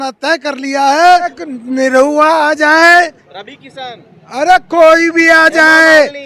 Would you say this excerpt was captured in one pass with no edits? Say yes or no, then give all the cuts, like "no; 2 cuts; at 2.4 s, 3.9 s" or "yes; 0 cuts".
no; 1 cut; at 1.4 s